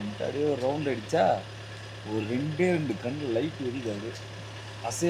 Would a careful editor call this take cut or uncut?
uncut